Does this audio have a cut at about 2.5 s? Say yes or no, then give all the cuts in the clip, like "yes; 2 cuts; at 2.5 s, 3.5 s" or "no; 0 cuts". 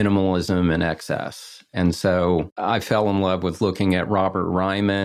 yes; 1 cut; at 2.5 s